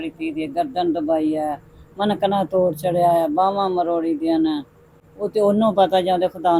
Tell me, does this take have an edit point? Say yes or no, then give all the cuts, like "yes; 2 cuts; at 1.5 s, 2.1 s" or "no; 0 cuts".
no; 0 cuts